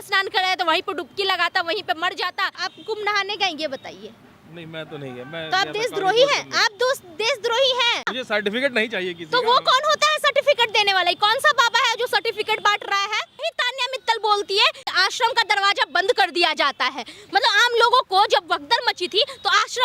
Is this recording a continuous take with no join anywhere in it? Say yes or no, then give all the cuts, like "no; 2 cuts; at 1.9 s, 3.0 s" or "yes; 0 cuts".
no; 4 cuts; at 2.6 s, 8.2 s, 13.5 s, 14.8 s